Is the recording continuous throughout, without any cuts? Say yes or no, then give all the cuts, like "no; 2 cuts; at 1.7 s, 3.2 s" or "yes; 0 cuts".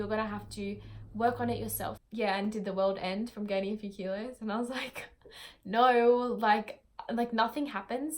no; 1 cut; at 1.9 s